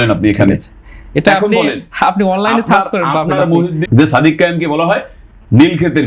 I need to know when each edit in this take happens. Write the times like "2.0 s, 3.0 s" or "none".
3.8 s